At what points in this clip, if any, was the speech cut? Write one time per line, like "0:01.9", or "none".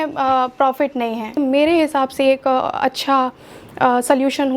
0:01.4